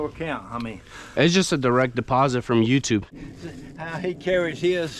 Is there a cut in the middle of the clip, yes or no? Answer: yes